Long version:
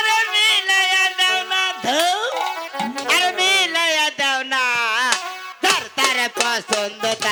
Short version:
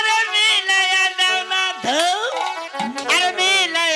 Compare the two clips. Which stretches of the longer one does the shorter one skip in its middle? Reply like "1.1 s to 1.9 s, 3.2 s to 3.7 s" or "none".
none